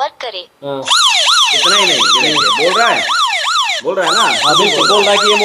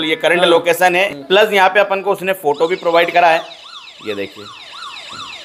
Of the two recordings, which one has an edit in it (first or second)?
second